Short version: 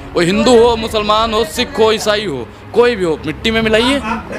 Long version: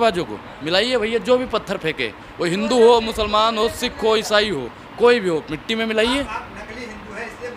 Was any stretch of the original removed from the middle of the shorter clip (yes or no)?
no